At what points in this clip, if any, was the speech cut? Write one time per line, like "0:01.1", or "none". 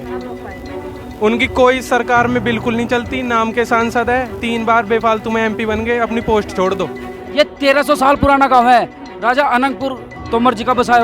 0:07.1
0:10.1